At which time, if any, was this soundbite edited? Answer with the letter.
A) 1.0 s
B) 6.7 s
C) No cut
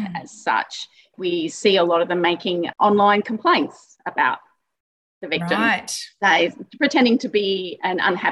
C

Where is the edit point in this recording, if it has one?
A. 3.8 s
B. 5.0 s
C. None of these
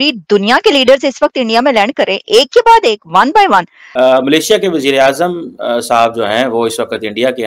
A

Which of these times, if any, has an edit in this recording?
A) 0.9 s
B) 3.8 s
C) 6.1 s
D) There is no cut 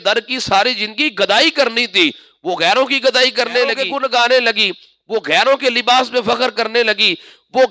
B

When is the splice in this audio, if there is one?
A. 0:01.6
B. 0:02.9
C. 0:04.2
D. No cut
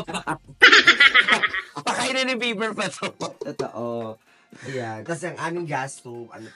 D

